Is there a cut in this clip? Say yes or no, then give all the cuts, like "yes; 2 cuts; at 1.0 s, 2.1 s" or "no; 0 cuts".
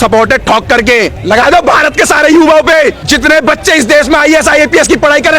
yes; 2 cuts; at 1.2 s, 3.0 s